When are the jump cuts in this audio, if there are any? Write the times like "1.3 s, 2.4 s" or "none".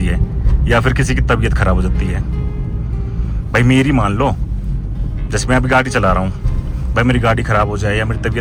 none